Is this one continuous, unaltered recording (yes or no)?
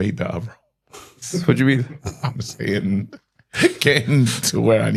yes